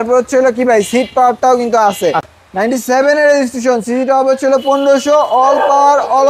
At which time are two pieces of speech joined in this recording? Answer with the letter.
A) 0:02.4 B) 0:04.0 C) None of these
A